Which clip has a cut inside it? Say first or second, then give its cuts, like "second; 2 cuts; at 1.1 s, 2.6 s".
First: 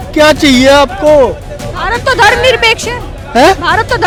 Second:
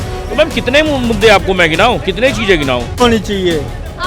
second; 1 cut; at 3.0 s